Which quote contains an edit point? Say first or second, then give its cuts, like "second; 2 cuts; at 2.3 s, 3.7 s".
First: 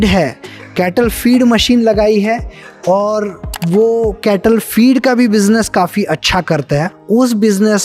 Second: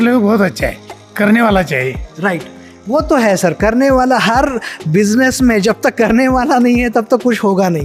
first; 1 cut; at 7.0 s